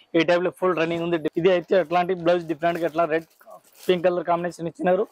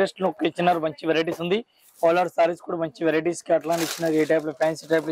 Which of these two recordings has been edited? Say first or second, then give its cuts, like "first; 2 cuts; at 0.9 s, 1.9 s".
first; 1 cut; at 1.3 s